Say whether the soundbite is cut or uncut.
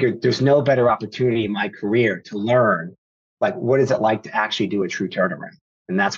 uncut